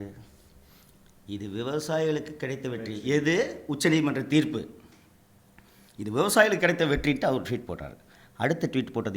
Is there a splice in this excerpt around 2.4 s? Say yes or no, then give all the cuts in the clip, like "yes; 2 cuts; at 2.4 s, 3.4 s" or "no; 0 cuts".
no; 0 cuts